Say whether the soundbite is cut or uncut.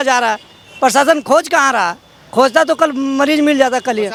uncut